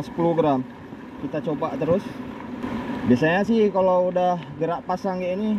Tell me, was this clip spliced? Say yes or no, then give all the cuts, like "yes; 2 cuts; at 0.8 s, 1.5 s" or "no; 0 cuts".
yes; 1 cut; at 2.6 s